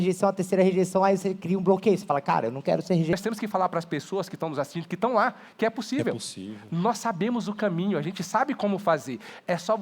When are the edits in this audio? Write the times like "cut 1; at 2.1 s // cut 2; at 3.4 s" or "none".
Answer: cut 1; at 3.1 s